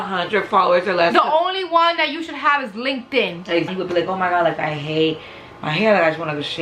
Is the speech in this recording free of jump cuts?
no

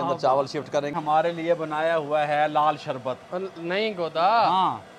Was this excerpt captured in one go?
no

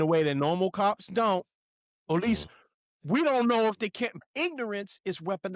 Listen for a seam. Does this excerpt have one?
yes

